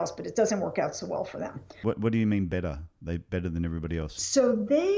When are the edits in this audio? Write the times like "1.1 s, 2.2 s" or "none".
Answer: 2.0 s, 3.7 s